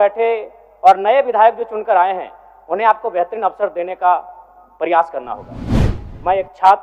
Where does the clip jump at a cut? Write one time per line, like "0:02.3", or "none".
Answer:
0:05.9